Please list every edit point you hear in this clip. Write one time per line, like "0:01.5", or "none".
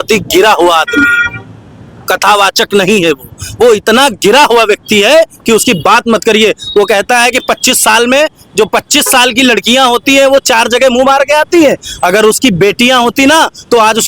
none